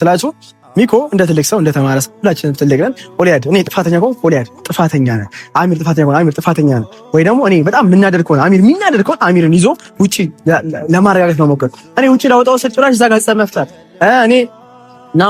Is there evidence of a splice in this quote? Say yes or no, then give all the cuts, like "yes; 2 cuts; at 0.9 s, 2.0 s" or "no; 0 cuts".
no; 0 cuts